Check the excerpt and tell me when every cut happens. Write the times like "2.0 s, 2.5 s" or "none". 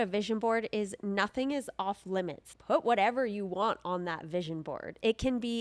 2.5 s